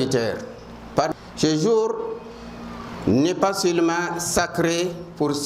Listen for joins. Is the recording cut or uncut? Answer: cut